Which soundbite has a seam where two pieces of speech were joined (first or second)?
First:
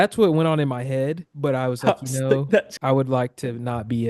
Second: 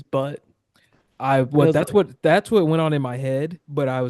first